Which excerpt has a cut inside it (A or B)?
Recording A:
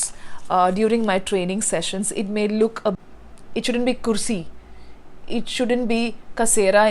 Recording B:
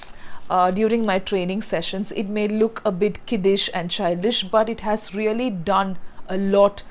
A